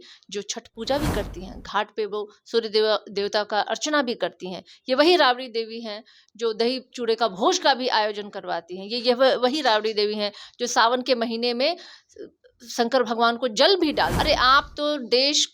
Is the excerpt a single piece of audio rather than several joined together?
no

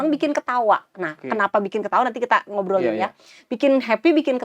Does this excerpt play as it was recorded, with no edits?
yes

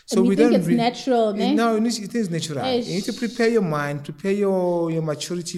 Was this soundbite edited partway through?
no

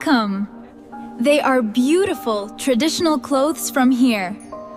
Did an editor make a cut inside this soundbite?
no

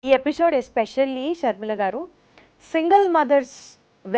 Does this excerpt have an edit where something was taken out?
no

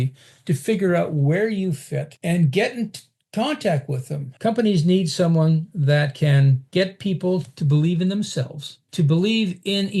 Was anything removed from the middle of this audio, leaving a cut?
yes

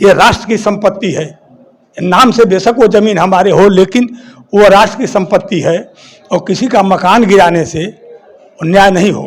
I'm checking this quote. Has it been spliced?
no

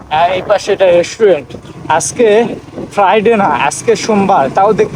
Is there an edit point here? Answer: no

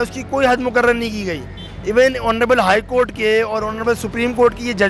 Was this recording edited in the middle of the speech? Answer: no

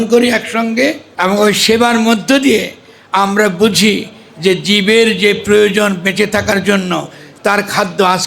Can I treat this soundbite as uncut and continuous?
no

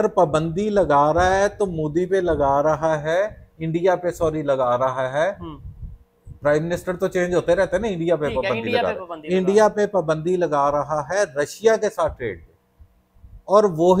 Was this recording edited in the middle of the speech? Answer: no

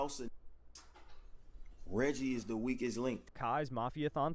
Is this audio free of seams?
no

